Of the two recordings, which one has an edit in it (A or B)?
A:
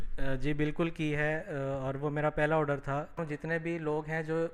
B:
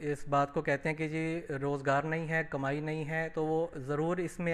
A